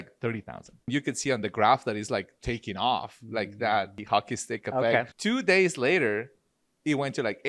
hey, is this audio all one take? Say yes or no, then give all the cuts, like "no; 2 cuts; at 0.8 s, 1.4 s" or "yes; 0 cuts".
no; 3 cuts; at 0.9 s, 4.0 s, 5.1 s